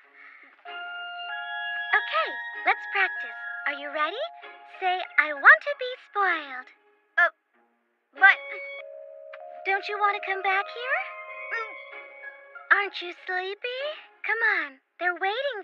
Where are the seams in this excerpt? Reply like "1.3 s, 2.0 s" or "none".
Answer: 6.7 s